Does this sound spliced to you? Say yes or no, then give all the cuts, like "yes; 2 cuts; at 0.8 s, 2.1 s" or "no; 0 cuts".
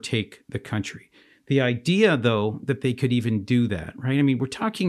no; 0 cuts